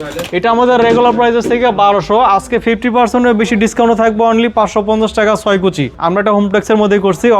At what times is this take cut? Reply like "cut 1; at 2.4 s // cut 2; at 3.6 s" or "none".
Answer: cut 1; at 5.9 s